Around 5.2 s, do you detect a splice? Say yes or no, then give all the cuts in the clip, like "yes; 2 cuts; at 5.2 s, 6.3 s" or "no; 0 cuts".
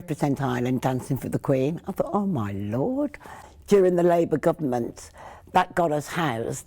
no; 1 cut; at 3.3 s